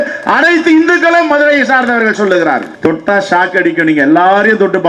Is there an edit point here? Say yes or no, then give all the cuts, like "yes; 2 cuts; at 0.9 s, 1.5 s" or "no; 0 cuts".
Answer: yes; 1 cut; at 2.7 s